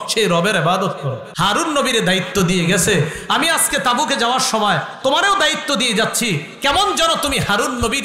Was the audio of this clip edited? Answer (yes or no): yes